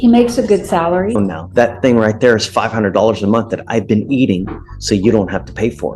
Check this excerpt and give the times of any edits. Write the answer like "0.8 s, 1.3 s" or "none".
1.2 s